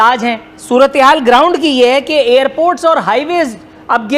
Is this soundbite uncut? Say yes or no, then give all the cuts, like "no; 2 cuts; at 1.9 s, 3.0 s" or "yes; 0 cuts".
yes; 0 cuts